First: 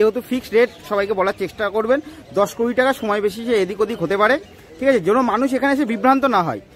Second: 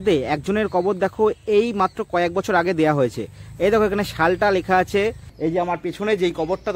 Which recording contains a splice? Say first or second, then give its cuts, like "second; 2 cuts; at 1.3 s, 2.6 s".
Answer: second; 1 cut; at 5.3 s